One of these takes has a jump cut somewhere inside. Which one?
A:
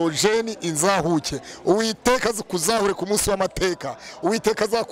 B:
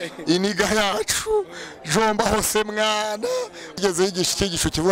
B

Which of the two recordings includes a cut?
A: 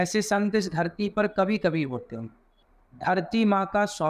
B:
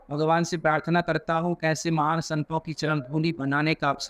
A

